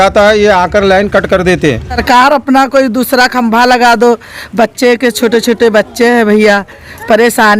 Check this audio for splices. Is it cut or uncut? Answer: cut